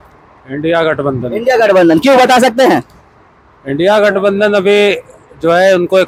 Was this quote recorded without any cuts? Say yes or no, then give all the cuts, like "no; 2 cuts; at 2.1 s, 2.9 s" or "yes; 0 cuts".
yes; 0 cuts